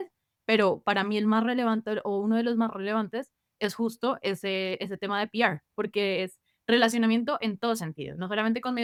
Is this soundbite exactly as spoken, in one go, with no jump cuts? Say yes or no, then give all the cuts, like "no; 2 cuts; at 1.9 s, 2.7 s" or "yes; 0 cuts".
yes; 0 cuts